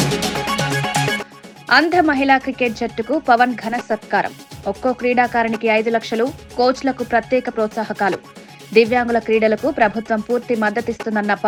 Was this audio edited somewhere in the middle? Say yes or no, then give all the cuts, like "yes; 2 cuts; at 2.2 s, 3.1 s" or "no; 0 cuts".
no; 0 cuts